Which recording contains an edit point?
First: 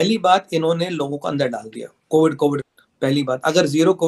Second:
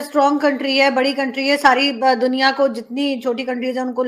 first; 1 cut; at 2.6 s

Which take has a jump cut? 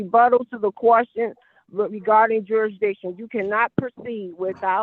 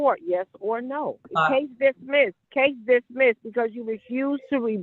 second; 2 cuts; at 1.2 s, 2.4 s

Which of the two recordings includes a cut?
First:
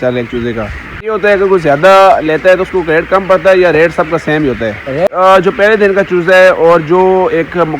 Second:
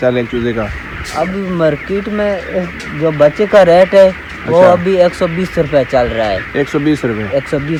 first; 2 cuts; at 1.1 s, 5.1 s

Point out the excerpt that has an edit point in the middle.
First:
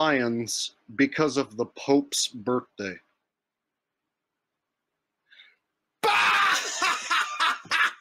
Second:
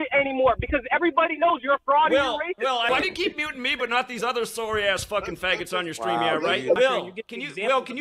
second; 2 cuts; at 2.9 s, 6.8 s

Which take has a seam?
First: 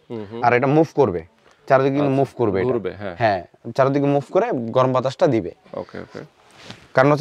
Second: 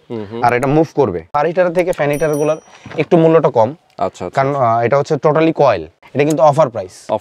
second; 2 cuts; at 1.2 s, 5.9 s

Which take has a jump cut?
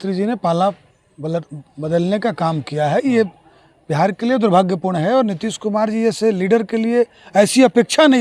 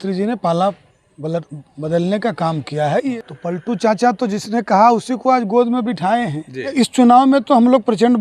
second; 2 cuts; at 3.1 s, 6.7 s

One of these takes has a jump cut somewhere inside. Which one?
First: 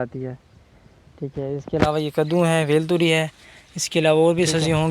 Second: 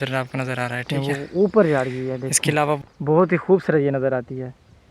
second; 1 cut; at 0.9 s

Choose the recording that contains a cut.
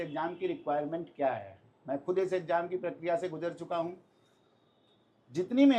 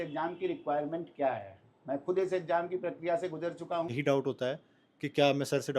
second; 1 cut; at 3.9 s

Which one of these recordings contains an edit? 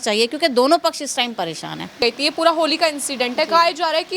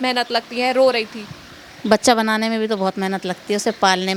first; 1 cut; at 2.0 s

